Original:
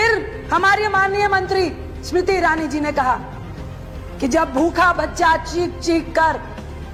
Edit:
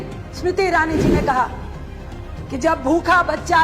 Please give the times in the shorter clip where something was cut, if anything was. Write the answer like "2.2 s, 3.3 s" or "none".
none